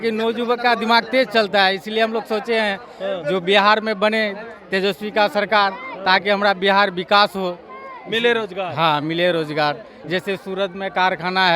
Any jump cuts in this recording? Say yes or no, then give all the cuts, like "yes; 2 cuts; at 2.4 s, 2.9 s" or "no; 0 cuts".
yes; 1 cut; at 9.9 s